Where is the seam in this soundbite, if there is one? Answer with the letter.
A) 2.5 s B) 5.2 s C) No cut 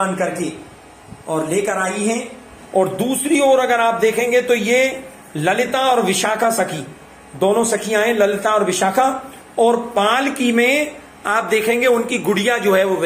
A